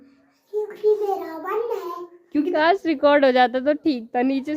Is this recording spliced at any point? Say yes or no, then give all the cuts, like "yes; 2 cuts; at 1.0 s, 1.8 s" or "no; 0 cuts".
yes; 1 cut; at 2.5 s